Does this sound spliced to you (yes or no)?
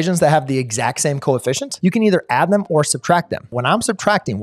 yes